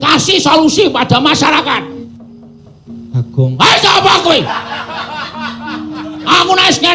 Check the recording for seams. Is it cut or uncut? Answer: cut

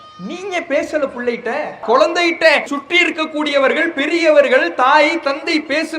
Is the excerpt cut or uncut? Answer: cut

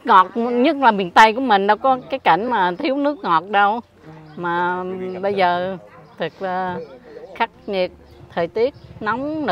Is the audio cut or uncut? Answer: uncut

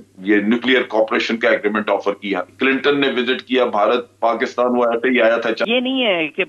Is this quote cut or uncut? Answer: cut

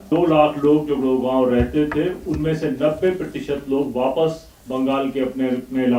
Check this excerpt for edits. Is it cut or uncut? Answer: uncut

